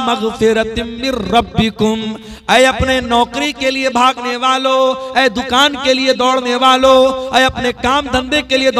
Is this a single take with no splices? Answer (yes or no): yes